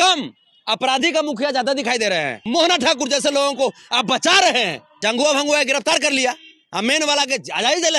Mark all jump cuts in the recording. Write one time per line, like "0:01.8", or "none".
0:02.4
0:04.8